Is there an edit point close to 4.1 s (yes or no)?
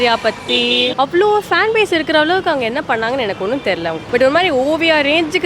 yes